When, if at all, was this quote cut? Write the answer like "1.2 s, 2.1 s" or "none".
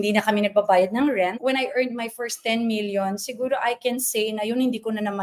1.4 s